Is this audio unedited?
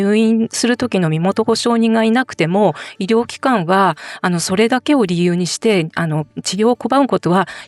yes; 0 cuts

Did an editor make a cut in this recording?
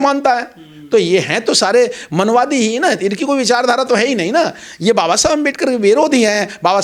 no; 0 cuts

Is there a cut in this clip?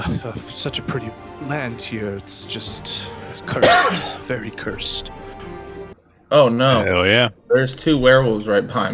yes; 1 cut; at 5.9 s

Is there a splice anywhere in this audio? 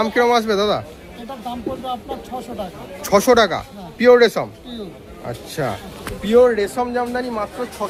no; 0 cuts

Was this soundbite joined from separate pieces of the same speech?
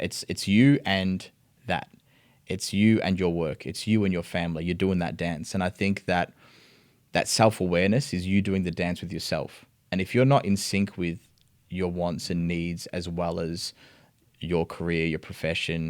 no; 0 cuts

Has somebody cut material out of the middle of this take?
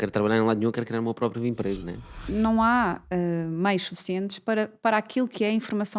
yes; 1 cut; at 2.3 s

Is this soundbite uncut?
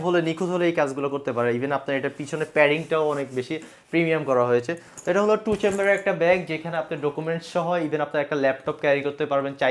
yes; 0 cuts

